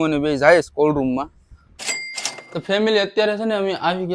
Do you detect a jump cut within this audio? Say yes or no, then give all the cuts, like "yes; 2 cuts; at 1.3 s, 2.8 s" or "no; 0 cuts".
yes; 1 cut; at 2.0 s